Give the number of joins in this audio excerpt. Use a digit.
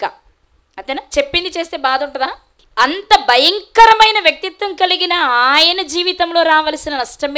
1